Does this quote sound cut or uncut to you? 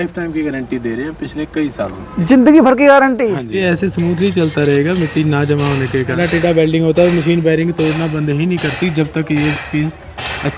cut